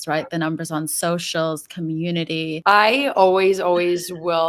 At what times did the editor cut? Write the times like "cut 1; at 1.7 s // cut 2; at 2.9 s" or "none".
cut 1; at 2.6 s